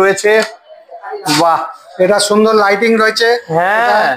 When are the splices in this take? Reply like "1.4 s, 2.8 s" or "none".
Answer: none